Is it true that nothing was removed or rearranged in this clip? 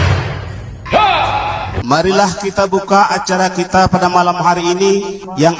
no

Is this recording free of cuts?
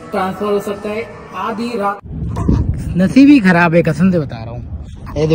no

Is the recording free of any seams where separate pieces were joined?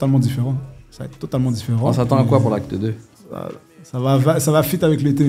yes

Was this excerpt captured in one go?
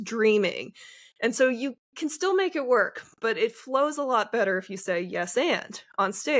yes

